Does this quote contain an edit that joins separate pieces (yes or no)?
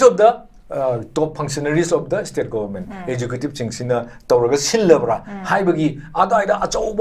no